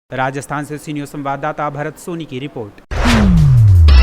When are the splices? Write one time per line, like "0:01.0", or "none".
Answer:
0:02.8